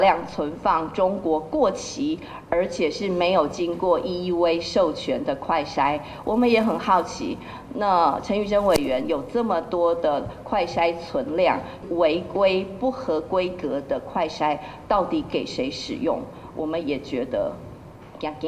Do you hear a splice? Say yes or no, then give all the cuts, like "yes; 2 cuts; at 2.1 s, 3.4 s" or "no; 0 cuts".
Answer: yes; 1 cut; at 11.8 s